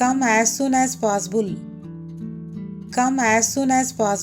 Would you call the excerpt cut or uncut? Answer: cut